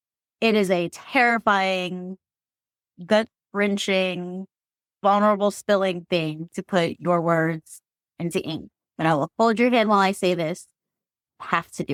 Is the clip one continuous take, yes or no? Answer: yes